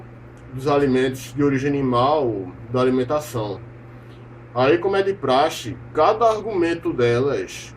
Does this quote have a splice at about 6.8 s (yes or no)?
yes